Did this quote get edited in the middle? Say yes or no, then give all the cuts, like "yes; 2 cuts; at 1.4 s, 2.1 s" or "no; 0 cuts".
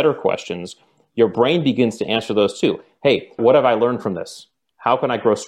yes; 1 cut; at 3.4 s